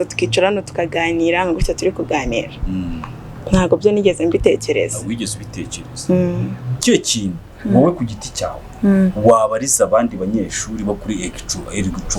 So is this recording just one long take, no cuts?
no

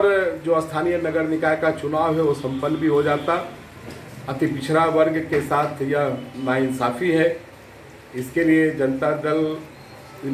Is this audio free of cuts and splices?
yes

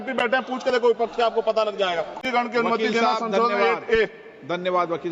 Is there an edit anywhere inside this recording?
yes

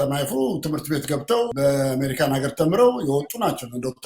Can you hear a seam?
yes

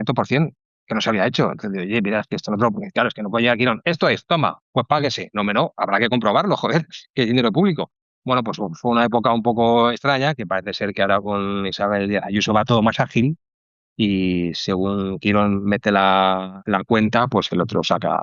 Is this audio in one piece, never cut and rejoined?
yes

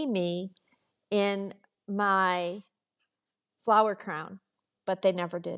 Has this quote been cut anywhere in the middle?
no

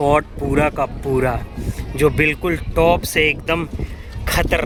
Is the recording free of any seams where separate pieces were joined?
yes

